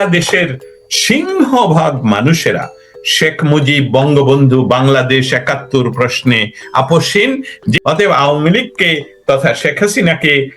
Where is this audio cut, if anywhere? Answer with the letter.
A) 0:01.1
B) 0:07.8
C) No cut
B